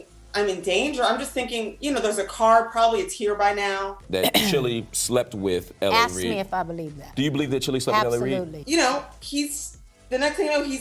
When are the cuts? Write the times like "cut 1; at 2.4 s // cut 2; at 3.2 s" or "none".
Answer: none